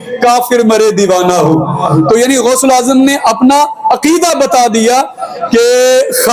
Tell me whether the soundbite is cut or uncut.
uncut